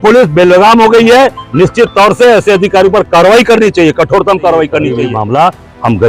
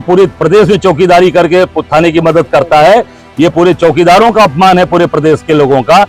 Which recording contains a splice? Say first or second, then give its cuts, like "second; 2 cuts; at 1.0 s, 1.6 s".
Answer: first; 1 cut; at 5.1 s